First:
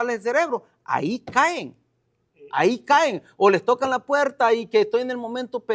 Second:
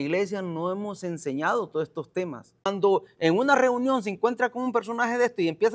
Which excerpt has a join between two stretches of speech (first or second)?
second